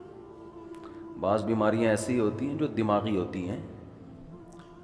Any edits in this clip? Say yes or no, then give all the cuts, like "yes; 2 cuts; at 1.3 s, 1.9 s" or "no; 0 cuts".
no; 0 cuts